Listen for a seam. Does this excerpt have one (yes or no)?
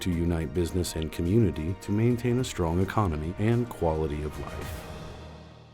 yes